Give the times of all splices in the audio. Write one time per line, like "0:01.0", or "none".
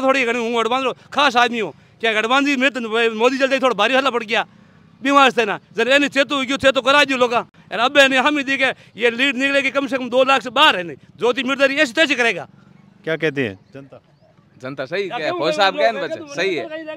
none